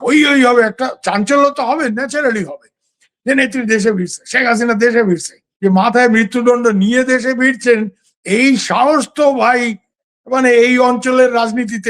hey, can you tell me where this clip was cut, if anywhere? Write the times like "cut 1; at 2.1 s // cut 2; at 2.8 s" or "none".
cut 1; at 5.4 s